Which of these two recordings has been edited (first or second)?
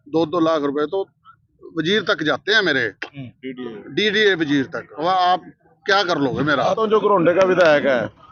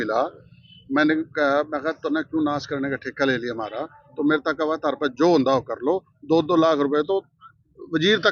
first